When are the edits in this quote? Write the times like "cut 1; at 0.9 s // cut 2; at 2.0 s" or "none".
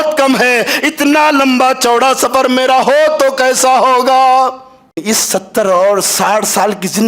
cut 1; at 5.0 s